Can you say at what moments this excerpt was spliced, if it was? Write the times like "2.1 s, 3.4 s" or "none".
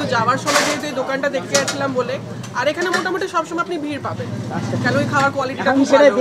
none

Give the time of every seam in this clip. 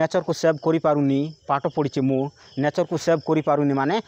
none

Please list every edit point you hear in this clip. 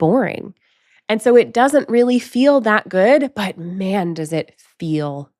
none

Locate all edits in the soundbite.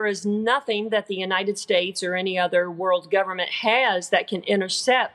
none

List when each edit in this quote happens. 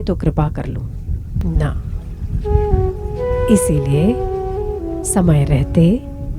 1.4 s

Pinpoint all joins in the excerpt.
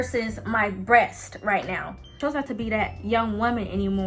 2.1 s

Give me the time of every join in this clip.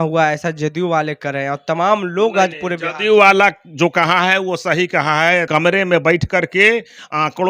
5.5 s

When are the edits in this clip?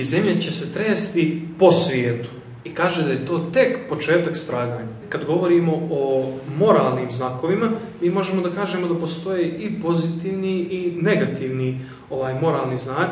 5.0 s

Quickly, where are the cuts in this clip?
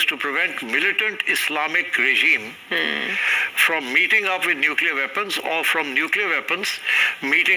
none

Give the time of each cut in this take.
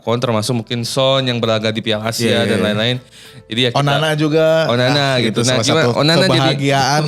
none

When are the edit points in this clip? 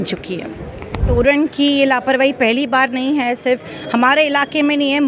1.1 s

